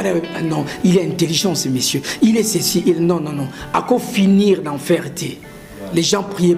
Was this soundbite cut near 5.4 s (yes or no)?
no